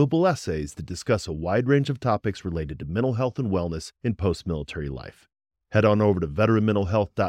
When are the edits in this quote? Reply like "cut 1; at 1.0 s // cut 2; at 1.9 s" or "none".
none